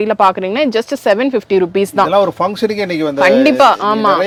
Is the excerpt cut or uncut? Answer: uncut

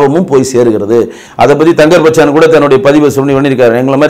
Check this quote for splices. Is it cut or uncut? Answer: cut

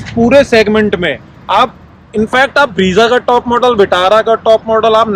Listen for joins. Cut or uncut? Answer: uncut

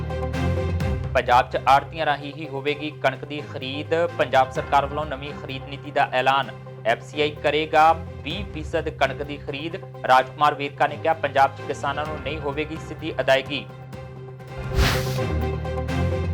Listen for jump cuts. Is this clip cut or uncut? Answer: cut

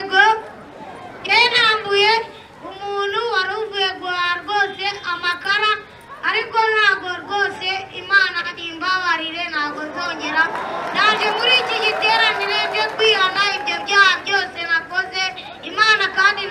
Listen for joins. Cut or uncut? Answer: uncut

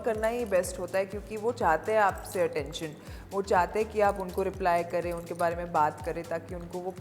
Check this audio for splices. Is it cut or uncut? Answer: uncut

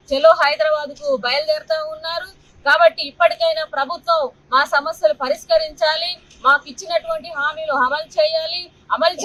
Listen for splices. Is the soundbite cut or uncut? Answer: uncut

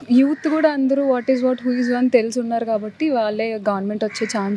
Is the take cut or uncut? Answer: uncut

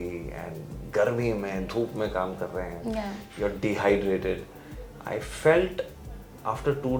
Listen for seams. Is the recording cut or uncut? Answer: uncut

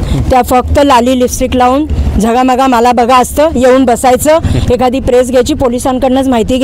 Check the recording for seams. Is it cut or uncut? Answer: uncut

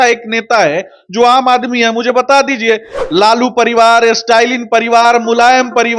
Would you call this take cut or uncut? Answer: uncut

